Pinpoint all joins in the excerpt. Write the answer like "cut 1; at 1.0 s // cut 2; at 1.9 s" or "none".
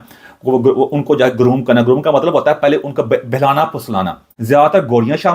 cut 1; at 4.3 s